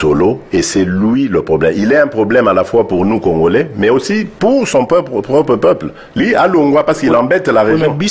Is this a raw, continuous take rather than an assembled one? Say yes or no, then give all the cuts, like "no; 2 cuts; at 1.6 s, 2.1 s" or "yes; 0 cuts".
no; 1 cut; at 6.2 s